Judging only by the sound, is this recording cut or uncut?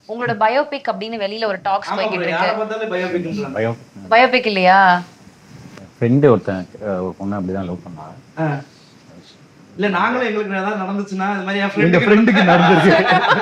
uncut